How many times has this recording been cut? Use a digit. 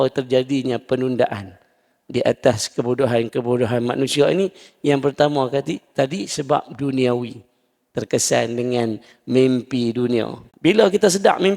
1